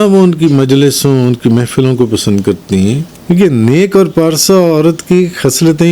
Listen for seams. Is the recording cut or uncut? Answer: cut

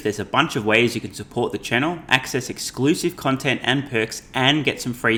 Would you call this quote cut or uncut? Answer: uncut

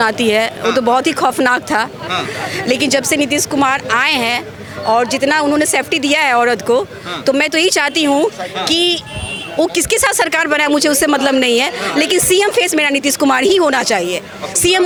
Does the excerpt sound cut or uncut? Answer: uncut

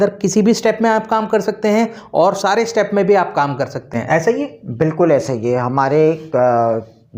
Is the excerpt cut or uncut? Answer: uncut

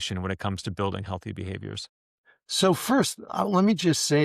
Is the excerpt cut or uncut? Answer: cut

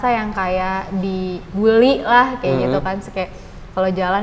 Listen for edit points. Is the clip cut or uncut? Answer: cut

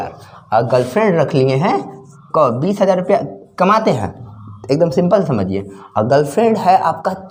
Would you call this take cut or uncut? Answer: uncut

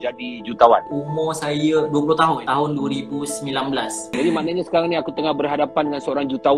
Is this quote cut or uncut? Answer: cut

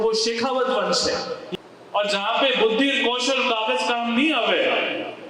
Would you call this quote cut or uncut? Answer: cut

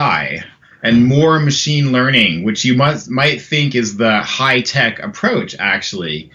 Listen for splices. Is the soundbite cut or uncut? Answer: uncut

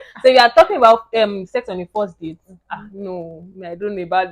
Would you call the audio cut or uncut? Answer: uncut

